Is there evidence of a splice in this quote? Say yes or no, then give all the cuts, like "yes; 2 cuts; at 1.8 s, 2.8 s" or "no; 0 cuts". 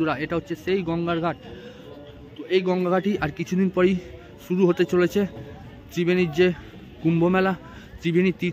no; 0 cuts